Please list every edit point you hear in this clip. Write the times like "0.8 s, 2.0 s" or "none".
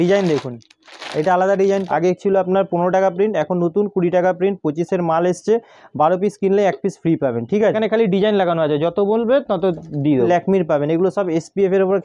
1.9 s, 7.8 s, 10.3 s